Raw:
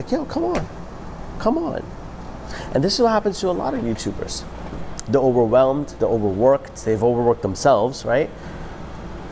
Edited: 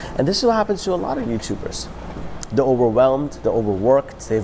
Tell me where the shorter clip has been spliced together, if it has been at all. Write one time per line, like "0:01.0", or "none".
none

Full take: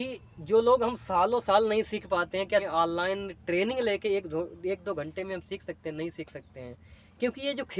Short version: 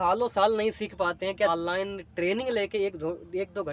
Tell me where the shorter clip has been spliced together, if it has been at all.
0:01.5

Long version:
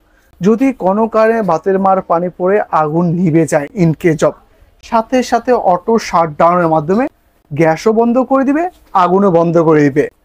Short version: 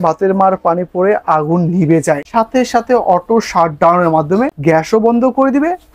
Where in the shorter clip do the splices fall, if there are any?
0:02.2
0:04.5

